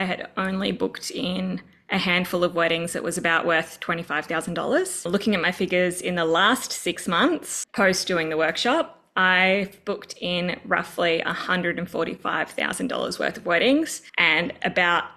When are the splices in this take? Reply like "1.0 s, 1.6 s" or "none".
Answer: 5.1 s, 7.6 s, 14.0 s